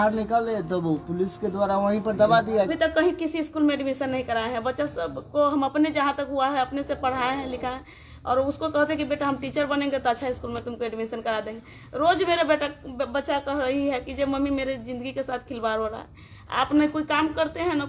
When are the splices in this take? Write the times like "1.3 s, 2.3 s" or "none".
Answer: 2.7 s